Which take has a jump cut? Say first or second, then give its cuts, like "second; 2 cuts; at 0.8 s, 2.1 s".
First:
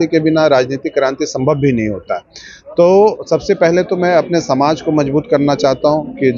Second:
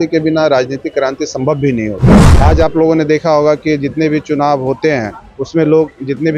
second; 1 cut; at 2.2 s